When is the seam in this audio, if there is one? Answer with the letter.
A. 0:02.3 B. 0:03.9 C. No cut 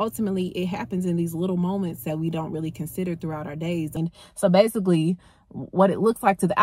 B